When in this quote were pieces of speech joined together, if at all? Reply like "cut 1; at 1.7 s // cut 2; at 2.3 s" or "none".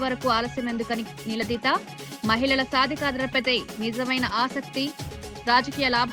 none